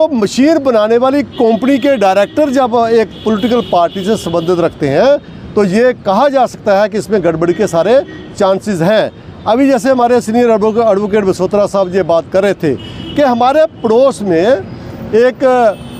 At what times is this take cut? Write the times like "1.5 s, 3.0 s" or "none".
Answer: none